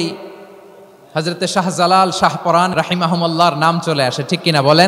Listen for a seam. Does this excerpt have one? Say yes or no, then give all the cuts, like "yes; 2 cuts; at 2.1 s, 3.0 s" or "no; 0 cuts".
yes; 1 cut; at 2.7 s